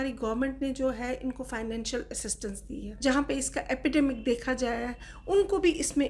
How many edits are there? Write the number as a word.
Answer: one